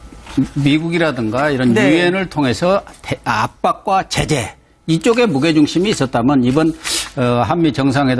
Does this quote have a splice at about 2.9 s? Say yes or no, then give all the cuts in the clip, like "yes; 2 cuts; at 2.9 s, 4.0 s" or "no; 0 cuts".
no; 1 cut; at 6.1 s